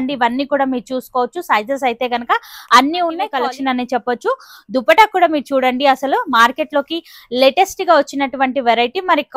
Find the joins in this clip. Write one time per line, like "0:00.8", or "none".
0:03.3